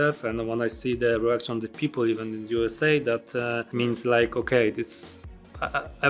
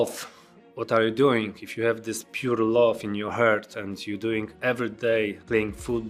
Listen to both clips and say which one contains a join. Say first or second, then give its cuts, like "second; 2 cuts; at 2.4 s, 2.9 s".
first; 1 cut; at 3.6 s